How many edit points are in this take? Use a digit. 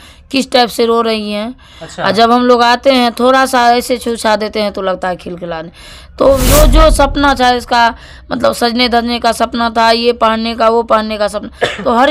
1